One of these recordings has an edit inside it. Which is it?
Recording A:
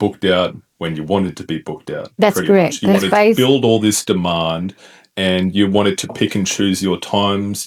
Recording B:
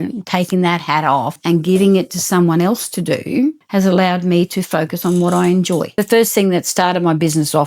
B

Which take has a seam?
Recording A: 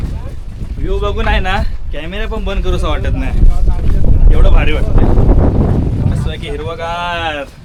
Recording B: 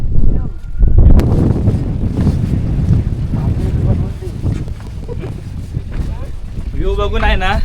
B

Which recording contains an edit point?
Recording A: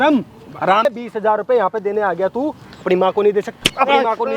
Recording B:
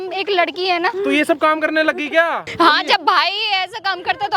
B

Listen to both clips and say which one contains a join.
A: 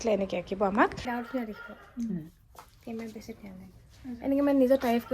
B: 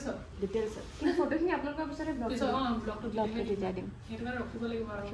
A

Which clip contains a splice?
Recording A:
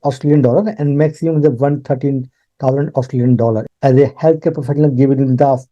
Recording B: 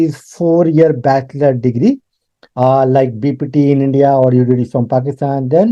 A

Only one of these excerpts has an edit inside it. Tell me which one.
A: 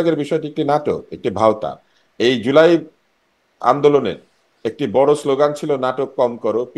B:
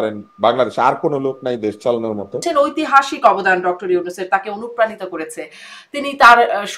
B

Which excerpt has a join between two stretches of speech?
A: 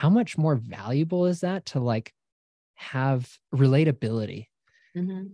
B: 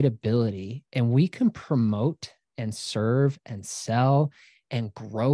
A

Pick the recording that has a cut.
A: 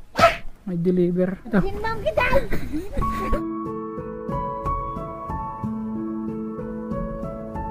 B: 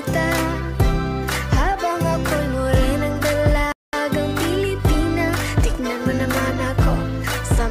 A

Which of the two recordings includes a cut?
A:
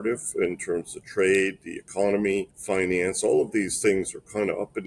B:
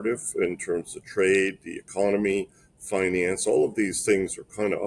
A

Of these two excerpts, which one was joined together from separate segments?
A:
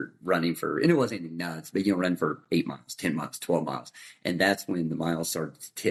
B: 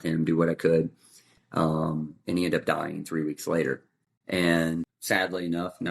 B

